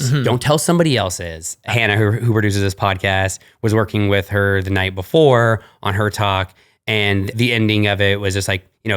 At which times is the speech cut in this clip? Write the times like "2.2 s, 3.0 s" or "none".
1.7 s, 7.3 s